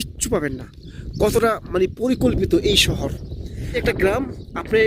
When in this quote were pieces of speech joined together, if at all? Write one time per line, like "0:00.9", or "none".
none